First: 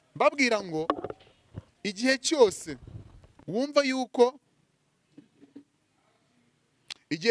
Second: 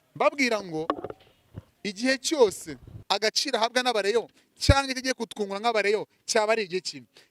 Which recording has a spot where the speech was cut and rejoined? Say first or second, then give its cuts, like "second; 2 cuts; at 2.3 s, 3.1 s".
second; 1 cut; at 2.9 s